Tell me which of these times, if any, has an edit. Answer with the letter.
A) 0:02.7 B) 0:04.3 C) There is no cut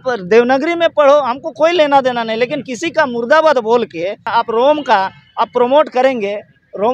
B